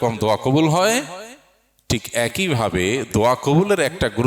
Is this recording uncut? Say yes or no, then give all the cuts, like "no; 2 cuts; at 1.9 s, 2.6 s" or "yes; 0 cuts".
yes; 0 cuts